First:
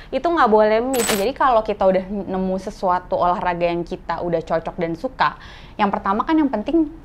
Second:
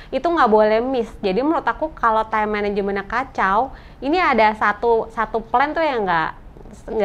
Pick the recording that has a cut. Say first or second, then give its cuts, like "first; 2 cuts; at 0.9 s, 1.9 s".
first; 1 cut; at 1.1 s